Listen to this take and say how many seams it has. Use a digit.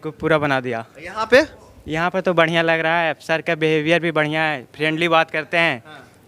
0